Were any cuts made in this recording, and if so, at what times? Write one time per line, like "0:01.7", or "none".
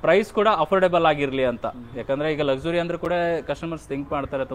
none